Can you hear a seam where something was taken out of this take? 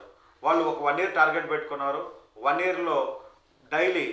no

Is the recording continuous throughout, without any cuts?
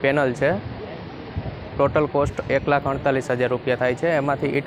yes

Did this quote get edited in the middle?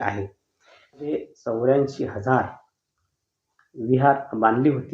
yes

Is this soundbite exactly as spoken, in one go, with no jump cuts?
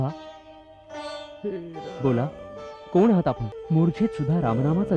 no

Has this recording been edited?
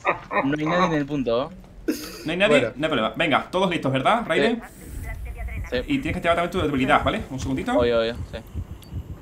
no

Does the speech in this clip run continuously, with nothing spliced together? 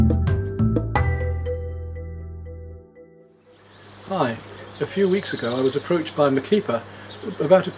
yes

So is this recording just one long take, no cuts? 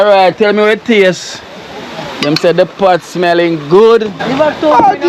no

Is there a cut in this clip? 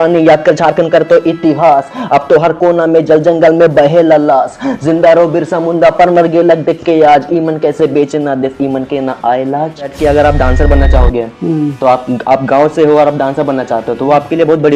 yes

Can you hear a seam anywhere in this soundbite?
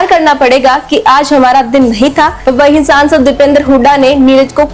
yes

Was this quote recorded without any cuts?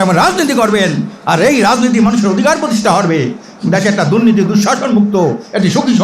yes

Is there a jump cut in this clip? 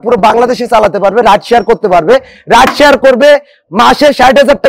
no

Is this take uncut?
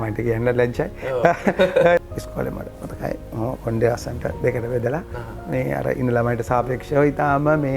no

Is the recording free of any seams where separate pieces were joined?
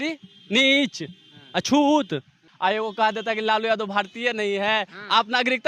no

